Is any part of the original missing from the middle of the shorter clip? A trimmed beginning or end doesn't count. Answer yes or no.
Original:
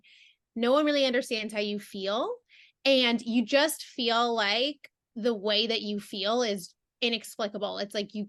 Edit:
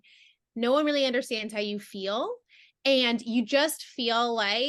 no